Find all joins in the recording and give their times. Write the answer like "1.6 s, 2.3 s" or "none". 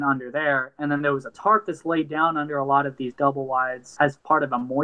1.3 s, 4.0 s